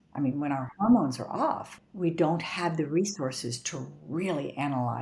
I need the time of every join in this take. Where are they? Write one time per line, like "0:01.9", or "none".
0:01.7